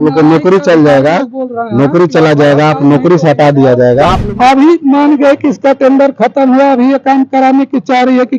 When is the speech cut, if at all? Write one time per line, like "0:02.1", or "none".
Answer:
0:04.2